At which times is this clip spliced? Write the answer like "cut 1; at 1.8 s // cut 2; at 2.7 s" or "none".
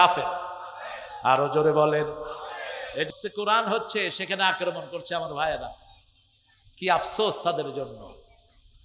cut 1; at 3.1 s